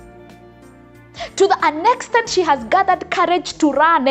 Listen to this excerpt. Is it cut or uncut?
cut